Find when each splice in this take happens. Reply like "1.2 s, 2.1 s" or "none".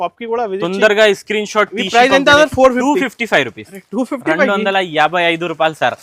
none